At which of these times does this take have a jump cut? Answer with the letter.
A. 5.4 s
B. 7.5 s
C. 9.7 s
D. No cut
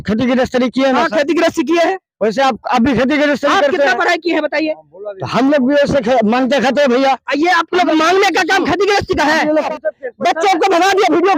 C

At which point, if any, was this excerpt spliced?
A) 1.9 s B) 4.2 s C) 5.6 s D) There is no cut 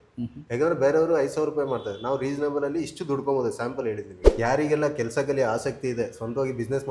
B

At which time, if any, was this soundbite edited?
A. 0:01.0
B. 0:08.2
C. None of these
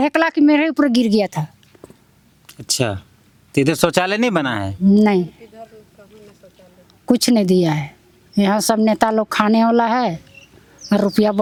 C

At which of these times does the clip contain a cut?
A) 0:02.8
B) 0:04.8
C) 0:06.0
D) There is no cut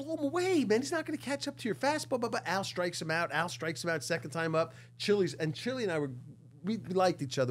D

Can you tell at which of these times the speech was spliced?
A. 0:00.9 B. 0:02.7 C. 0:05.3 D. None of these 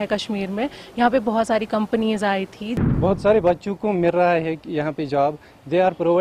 B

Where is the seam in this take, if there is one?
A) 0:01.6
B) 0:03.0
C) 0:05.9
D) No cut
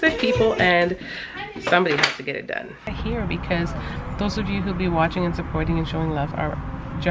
B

